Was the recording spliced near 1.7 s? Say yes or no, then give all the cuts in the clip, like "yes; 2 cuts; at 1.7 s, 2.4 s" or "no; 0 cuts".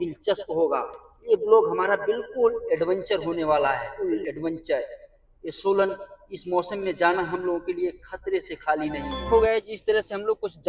no; 2 cuts; at 3.9 s, 9.3 s